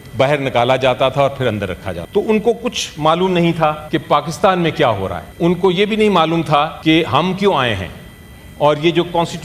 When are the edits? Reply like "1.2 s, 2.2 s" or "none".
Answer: 1.9 s, 3.8 s, 5.2 s, 6.7 s